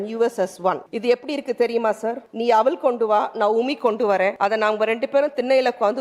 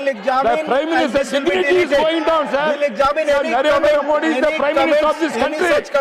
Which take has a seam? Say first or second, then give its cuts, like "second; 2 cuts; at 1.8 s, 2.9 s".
first; 3 cuts; at 0.9 s, 2.3 s, 4.4 s